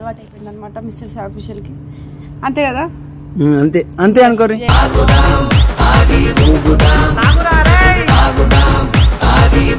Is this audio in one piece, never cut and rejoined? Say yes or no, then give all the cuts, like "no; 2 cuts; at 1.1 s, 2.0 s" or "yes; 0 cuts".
yes; 0 cuts